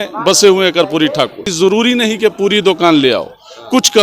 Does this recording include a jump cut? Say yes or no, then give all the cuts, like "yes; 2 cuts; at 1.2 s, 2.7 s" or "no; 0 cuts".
yes; 1 cut; at 1.5 s